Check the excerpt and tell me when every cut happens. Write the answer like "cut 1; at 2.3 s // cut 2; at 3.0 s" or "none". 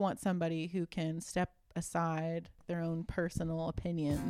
cut 1; at 2.6 s